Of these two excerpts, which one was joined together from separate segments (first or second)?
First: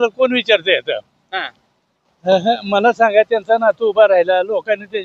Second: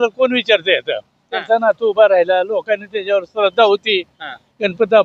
second